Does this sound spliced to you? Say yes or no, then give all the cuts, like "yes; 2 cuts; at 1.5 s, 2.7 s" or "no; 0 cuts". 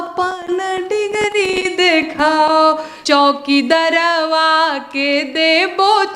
yes; 1 cut; at 2.9 s